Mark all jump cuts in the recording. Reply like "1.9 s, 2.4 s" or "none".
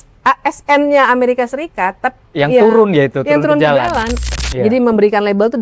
4.3 s